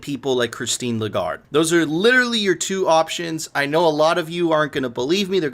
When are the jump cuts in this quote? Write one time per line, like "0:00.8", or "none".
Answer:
0:01.5